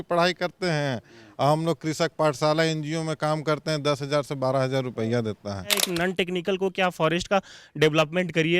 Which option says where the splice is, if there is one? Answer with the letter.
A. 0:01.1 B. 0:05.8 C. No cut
B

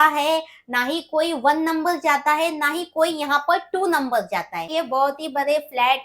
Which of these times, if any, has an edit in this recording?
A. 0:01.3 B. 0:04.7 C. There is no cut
B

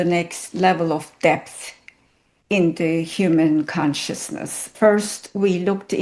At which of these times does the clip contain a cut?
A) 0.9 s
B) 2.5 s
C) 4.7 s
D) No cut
C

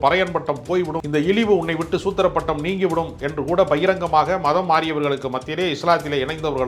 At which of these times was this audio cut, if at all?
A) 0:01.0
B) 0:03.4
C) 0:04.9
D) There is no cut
A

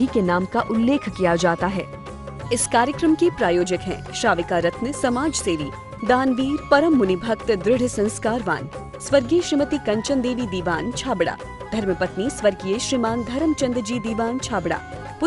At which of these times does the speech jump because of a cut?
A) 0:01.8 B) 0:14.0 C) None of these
A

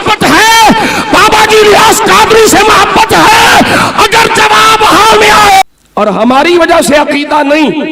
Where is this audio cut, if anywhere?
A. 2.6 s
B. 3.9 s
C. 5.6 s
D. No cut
C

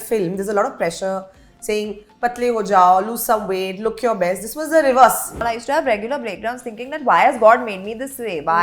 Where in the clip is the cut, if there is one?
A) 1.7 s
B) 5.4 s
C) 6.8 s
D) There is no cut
B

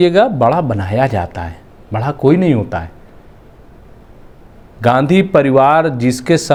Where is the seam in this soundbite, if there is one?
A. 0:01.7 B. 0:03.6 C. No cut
C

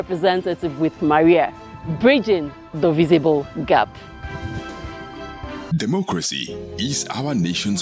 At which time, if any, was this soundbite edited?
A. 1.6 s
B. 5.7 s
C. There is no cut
B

